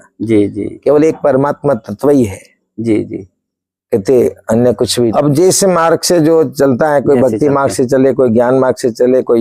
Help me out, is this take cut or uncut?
cut